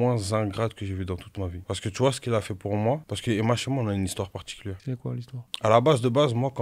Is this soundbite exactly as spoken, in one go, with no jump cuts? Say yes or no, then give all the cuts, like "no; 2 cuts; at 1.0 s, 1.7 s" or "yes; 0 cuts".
yes; 0 cuts